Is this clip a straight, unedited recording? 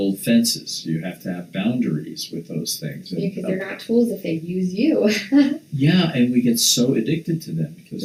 yes; 0 cuts

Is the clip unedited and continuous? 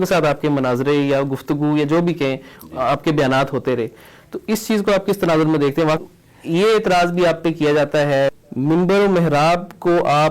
no; 2 cuts; at 6.0 s, 8.3 s

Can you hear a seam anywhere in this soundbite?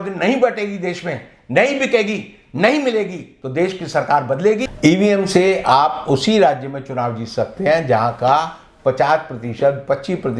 yes; 1 cut; at 4.7 s

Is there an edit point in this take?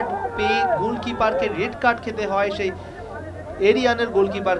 no; 0 cuts

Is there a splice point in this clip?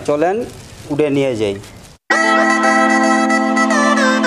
yes; 1 cut; at 2.0 s

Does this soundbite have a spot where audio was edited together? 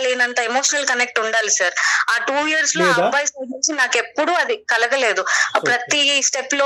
no; 0 cuts

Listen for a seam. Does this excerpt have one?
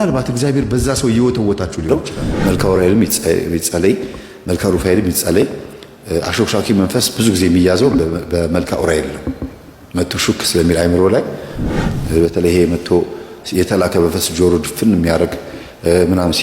yes; 1 cut; at 1.9 s

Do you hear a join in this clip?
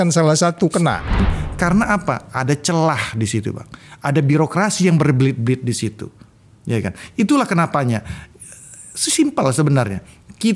yes; 1 cut; at 1.2 s

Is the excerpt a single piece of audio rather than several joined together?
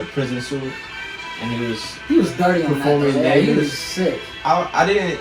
yes; 0 cuts

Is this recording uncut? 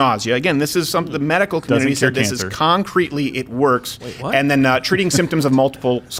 yes; 0 cuts

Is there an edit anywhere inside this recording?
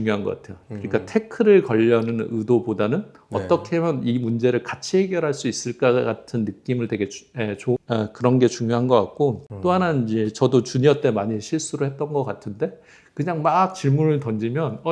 no; 0 cuts

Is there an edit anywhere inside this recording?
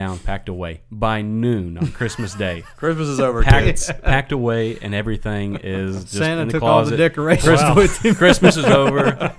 no; 0 cuts

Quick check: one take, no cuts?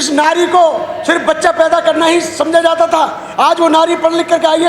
yes; 0 cuts

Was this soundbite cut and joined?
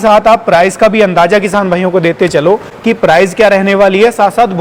no; 0 cuts

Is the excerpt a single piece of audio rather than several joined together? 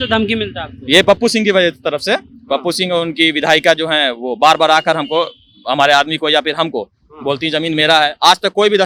yes; 0 cuts

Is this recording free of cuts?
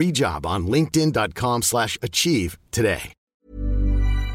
no; 1 cut; at 3.2 s

